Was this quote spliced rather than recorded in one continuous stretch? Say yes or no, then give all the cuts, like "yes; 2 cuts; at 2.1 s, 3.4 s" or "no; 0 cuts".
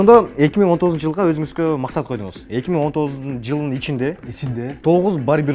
no; 0 cuts